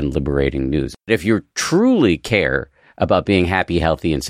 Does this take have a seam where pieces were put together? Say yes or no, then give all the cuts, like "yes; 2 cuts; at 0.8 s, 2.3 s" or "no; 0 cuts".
yes; 1 cut; at 1.1 s